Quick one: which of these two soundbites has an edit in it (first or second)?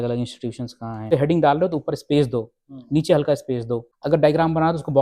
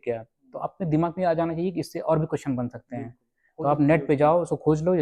first